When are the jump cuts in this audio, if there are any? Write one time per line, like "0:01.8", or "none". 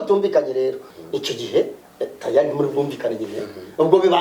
0:00.9